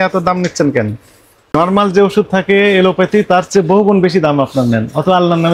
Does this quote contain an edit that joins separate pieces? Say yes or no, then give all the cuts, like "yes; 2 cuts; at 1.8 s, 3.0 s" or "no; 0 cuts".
yes; 1 cut; at 1.5 s